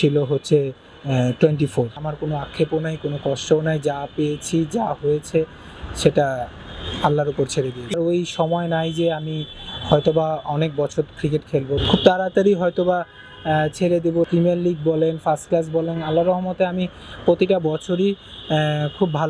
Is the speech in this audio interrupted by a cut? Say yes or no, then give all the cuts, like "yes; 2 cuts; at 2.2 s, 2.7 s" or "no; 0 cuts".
yes; 4 cuts; at 2.1 s, 7.9 s, 11.8 s, 14.3 s